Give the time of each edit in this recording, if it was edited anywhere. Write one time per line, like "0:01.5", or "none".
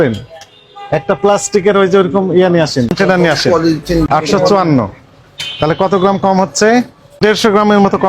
0:02.9
0:04.1
0:07.2